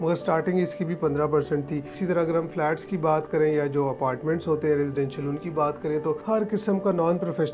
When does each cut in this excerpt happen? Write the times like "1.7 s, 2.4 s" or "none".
1.9 s, 6.2 s